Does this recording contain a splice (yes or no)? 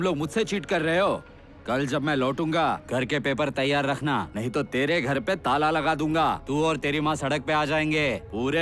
yes